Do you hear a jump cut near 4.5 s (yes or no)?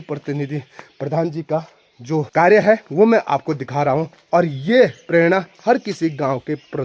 no